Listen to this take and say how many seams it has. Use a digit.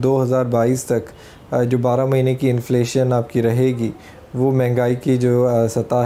0